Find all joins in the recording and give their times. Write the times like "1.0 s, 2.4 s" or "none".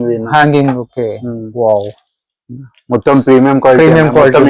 none